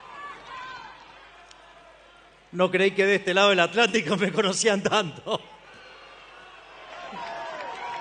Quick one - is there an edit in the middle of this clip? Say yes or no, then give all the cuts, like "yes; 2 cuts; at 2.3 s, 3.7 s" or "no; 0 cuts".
no; 0 cuts